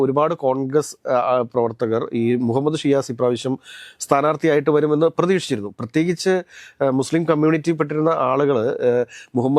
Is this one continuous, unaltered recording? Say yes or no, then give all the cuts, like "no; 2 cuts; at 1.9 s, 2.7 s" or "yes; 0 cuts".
yes; 0 cuts